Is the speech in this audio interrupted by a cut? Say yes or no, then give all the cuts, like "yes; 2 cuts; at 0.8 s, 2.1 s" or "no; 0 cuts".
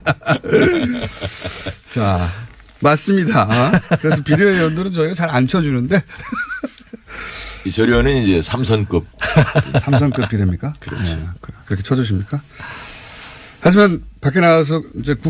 no; 0 cuts